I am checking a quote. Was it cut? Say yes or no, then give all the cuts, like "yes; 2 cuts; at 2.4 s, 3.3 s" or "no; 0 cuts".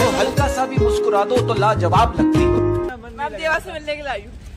yes; 1 cut; at 2.9 s